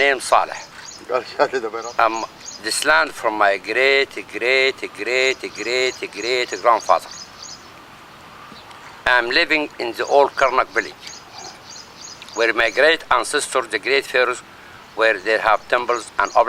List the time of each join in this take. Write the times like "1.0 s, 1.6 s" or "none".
1.8 s